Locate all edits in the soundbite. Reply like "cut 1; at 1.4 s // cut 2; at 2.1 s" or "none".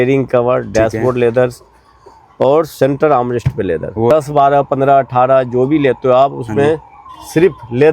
cut 1; at 4.1 s

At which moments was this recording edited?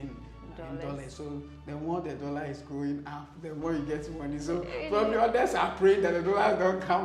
none

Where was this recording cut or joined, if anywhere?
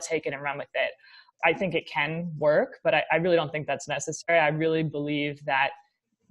cut 1; at 1.2 s

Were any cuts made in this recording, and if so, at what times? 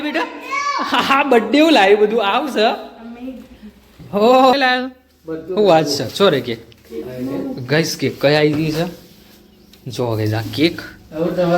cut 1; at 4.5 s

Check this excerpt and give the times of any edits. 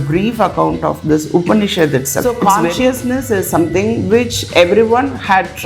cut 1; at 2.3 s

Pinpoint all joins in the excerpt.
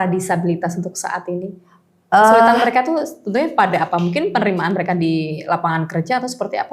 none

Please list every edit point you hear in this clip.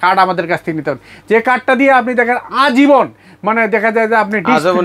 none

